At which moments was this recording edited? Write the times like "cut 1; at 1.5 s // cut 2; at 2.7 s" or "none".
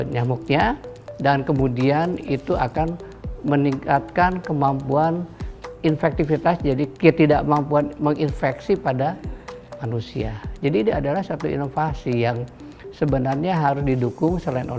cut 1; at 5.7 s // cut 2; at 6.9 s